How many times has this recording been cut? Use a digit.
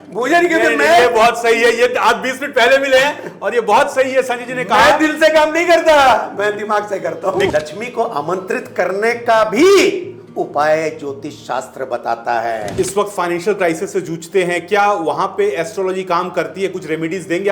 2